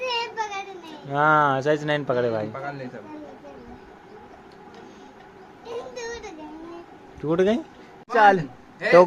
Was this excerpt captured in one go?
no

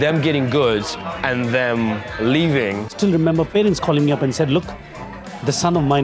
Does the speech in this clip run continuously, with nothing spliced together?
no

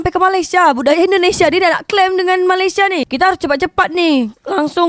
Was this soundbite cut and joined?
no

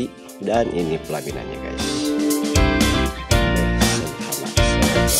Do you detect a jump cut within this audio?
yes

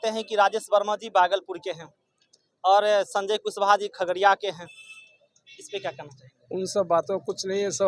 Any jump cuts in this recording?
no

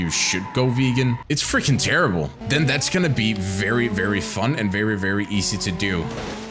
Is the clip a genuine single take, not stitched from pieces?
no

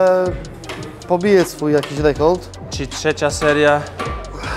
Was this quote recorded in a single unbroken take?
yes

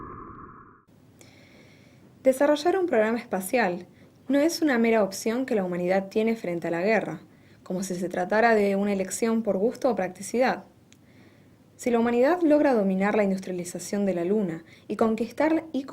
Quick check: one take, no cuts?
no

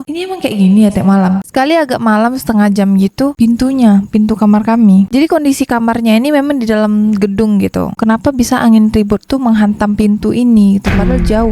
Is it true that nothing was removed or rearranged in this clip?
no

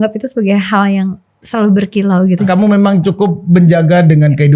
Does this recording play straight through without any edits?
no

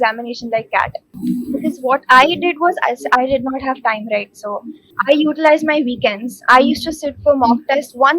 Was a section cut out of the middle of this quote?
yes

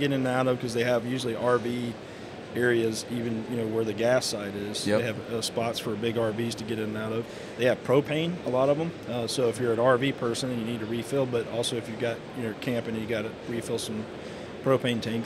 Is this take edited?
no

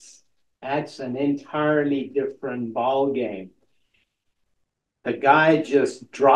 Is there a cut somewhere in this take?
no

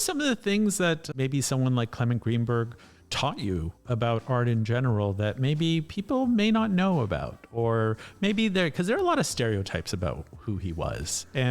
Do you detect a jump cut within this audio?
yes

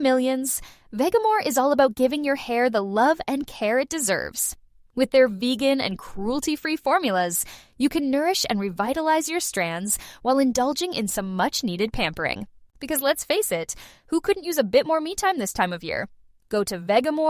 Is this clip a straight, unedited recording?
yes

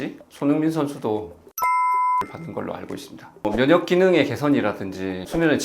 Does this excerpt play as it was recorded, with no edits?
no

